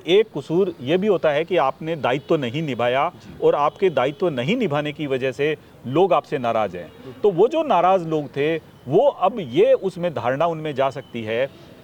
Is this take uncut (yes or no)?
yes